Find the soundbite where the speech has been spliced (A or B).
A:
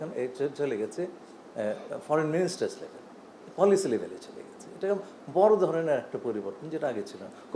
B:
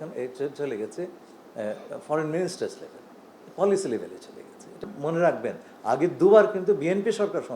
B